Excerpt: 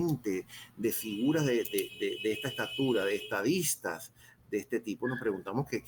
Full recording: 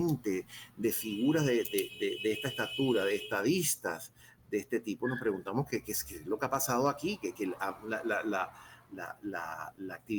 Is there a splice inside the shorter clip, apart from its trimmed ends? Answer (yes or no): no